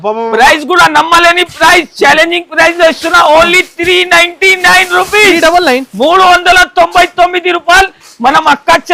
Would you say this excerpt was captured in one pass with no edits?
yes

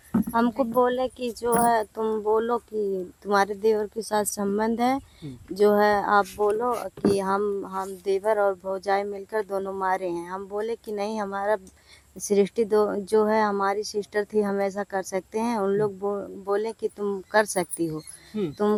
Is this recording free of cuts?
yes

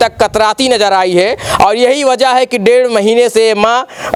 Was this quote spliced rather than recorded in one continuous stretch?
no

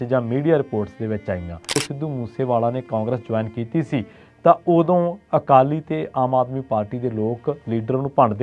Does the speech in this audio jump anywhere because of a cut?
yes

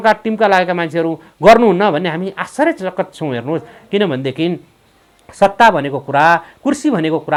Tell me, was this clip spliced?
no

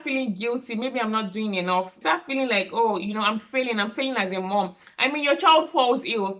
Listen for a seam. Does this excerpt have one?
yes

